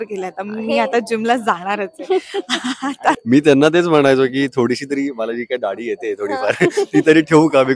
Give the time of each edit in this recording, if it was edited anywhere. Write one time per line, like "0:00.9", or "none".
0:03.2